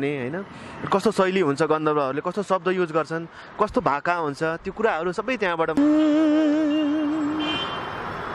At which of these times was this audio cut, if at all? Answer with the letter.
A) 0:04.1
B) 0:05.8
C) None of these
B